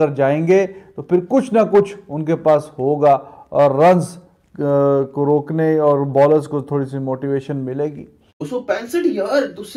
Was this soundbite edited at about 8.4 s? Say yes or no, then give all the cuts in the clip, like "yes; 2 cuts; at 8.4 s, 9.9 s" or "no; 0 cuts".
yes; 1 cut; at 8.4 s